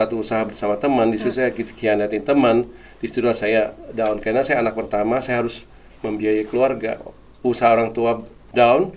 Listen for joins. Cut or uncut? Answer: uncut